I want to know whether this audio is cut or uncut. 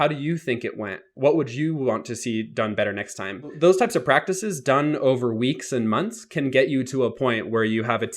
cut